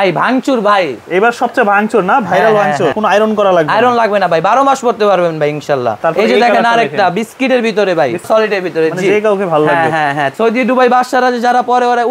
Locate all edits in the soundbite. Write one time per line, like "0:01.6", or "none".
0:03.0
0:05.9
0:08.3
0:10.3